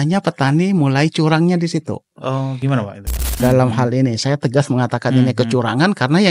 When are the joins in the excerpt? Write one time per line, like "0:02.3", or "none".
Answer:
0:03.4